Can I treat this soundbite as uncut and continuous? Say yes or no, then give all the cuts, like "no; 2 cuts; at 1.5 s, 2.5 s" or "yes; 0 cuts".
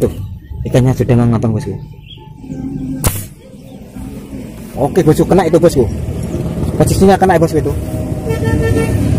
no; 1 cut; at 4.3 s